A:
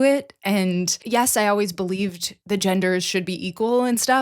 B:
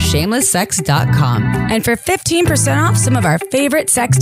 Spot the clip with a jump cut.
A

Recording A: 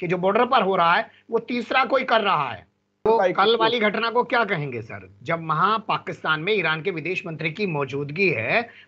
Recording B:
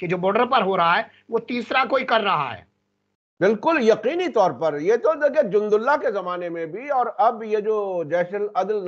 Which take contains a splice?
A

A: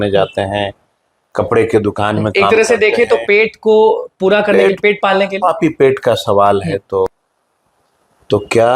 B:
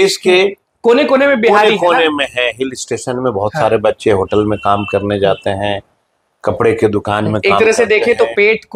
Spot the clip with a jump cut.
A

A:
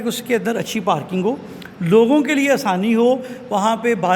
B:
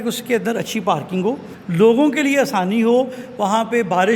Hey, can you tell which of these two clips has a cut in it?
B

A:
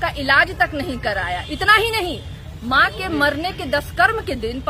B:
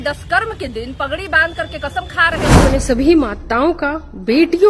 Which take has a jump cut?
B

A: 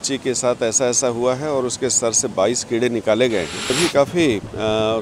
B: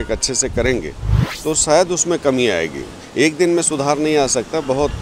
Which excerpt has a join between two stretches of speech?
A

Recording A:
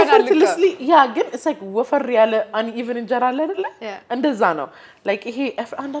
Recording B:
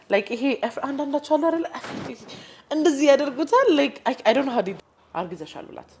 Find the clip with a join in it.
B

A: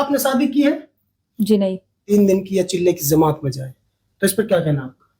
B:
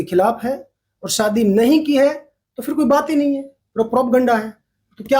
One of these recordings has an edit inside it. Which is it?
A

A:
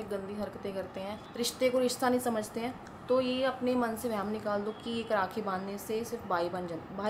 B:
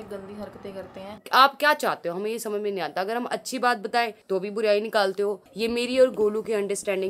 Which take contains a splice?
B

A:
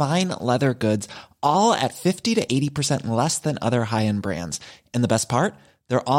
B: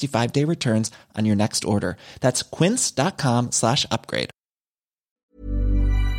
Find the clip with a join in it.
B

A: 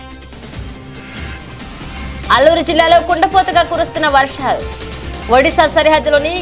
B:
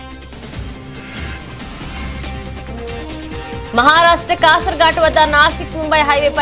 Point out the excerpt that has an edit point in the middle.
B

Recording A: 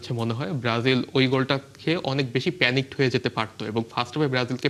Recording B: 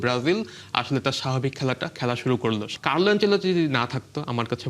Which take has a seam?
B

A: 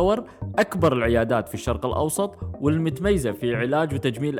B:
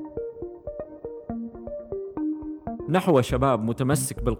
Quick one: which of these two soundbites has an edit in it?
B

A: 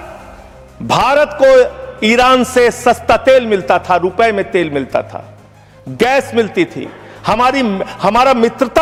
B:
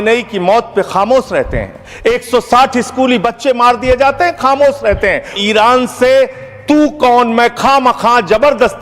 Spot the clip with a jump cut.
B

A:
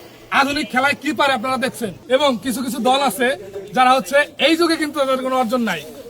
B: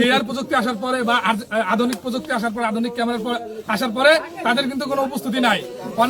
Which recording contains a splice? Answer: A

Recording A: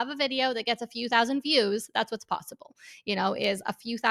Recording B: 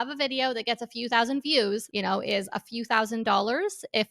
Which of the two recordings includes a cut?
B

